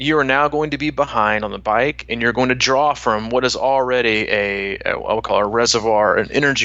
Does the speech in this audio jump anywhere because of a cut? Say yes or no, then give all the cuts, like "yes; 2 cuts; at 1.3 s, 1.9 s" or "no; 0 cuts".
no; 0 cuts